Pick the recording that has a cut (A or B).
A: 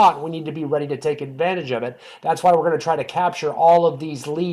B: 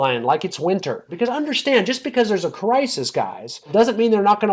B